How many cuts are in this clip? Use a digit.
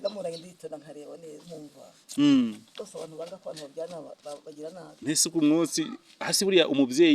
0